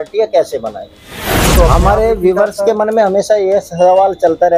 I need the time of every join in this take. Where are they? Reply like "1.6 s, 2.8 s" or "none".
1.5 s